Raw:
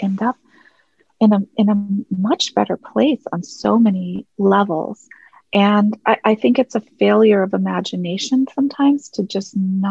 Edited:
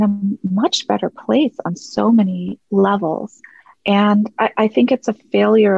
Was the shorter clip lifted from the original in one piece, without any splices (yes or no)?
yes